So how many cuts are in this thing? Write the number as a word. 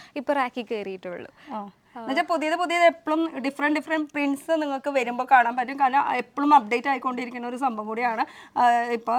zero